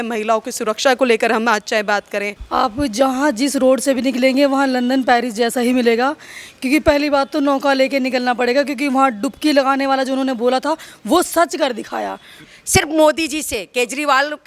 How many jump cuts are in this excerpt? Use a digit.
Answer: 2